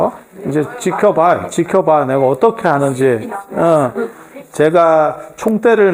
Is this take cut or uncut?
uncut